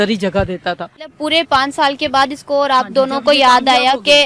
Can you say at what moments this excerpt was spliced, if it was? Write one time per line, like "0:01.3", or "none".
0:01.2

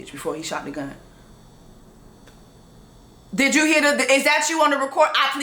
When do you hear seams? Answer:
none

